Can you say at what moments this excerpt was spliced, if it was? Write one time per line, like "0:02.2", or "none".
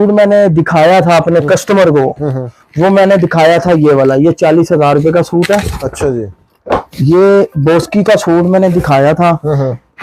none